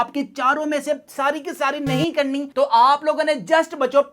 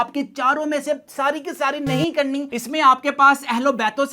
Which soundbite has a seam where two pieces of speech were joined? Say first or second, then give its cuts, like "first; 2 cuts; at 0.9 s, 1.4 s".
second; 1 cut; at 2.5 s